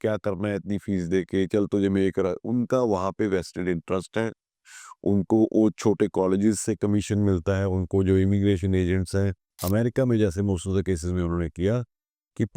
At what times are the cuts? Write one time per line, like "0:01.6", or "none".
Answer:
0:09.5